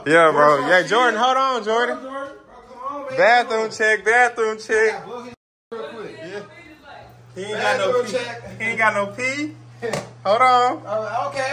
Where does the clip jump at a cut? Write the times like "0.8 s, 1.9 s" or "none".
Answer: none